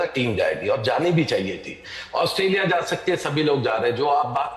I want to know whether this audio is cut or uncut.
uncut